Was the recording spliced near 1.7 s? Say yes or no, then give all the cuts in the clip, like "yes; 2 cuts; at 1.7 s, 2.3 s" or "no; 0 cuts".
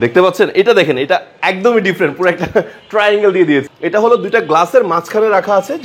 no; 1 cut; at 3.7 s